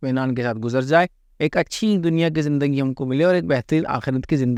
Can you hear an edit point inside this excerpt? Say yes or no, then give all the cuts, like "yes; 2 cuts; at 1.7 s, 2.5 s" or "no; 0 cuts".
no; 0 cuts